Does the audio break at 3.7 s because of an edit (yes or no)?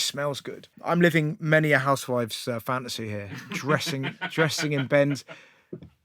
no